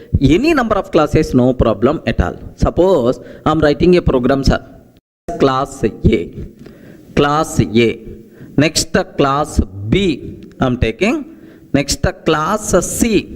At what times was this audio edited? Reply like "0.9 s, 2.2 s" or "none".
5.1 s